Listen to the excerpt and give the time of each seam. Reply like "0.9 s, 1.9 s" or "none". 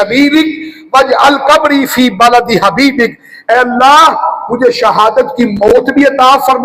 none

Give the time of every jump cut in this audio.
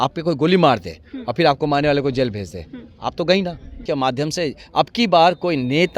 3.8 s

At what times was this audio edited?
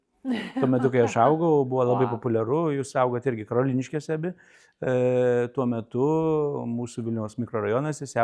none

